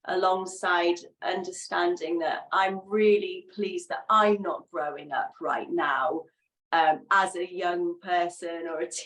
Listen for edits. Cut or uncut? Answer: uncut